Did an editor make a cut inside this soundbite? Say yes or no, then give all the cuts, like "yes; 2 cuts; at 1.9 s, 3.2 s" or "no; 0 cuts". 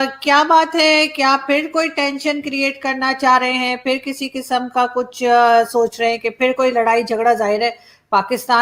no; 0 cuts